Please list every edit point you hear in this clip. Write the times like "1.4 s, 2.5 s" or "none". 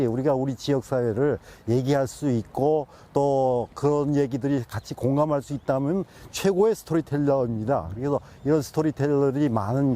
none